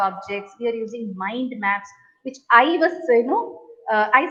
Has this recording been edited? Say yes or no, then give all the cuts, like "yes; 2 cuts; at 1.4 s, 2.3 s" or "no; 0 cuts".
no; 0 cuts